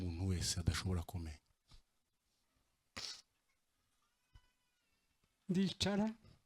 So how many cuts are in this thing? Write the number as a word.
one